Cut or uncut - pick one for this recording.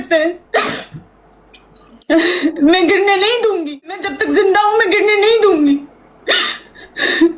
cut